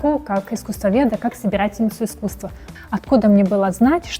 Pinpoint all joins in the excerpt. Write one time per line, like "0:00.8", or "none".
0:02.7

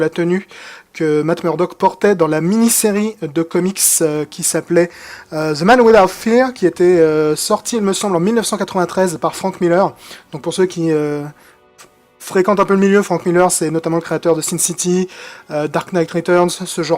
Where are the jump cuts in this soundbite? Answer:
0:01.4

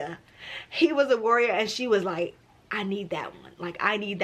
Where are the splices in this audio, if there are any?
none

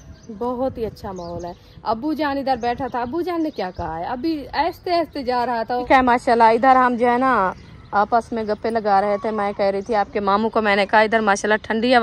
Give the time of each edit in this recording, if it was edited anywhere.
0:05.9

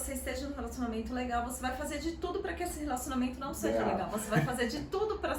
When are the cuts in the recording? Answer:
none

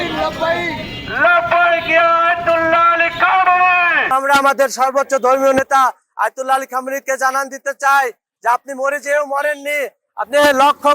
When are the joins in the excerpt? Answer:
0:04.1

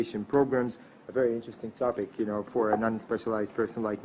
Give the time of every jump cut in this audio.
0:02.5

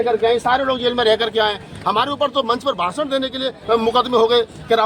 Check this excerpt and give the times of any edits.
none

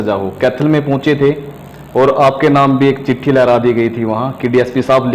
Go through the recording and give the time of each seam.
none

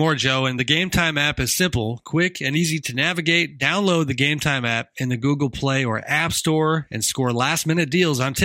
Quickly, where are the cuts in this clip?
none

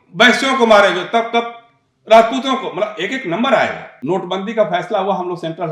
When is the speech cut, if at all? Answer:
0:03.9

